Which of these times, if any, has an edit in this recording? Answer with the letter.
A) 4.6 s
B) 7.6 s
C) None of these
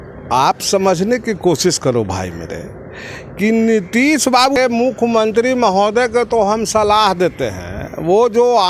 A